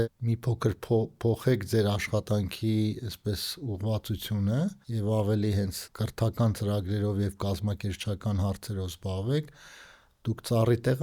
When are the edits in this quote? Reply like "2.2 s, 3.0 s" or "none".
4.9 s, 5.8 s